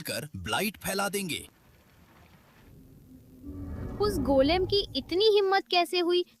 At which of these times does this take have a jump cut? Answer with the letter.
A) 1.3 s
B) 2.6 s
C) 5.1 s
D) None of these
B